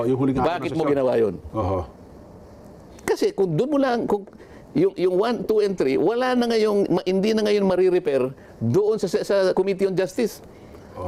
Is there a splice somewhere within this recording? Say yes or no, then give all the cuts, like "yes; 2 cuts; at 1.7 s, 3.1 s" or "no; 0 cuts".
no; 0 cuts